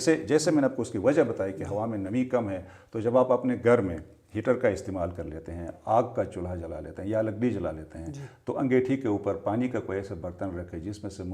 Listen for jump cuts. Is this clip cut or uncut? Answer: uncut